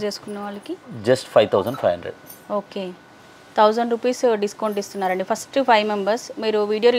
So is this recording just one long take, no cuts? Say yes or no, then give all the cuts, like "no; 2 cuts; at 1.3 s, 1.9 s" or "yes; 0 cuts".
yes; 0 cuts